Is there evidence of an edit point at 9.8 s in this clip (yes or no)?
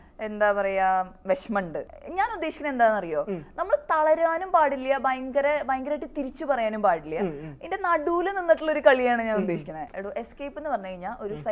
yes